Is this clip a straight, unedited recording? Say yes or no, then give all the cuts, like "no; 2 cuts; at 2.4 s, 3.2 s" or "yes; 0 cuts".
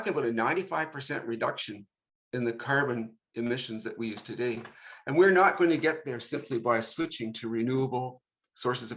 yes; 0 cuts